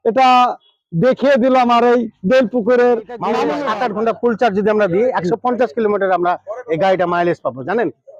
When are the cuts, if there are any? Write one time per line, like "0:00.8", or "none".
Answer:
0:03.5